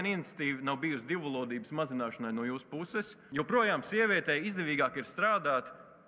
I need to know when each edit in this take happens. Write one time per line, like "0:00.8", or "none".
0:03.2